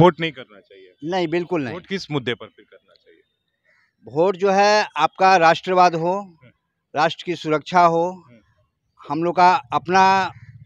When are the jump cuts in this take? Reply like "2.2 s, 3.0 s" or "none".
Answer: none